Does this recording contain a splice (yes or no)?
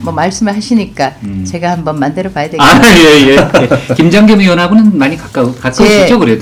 no